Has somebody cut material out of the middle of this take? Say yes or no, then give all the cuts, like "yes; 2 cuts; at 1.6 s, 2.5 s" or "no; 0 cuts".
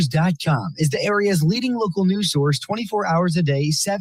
no; 0 cuts